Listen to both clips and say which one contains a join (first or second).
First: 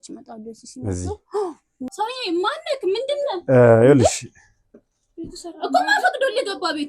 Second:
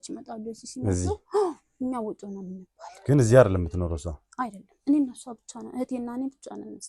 first